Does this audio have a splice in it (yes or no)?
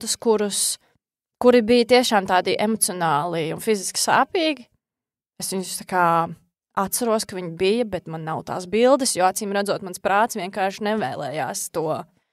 no